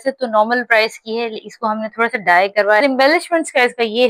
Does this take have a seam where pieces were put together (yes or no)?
yes